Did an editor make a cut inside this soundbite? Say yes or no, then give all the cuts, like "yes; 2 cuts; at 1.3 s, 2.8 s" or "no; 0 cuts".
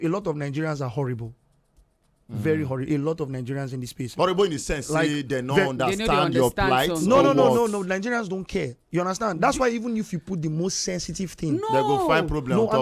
no; 0 cuts